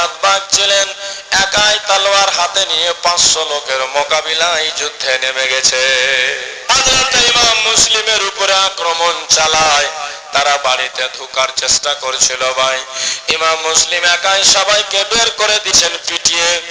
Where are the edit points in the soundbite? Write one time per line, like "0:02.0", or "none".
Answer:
0:06.5